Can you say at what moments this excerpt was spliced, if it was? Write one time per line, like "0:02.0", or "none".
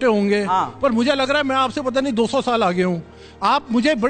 none